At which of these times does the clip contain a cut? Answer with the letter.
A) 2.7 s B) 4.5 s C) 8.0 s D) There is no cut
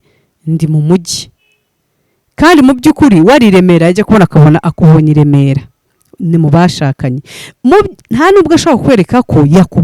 D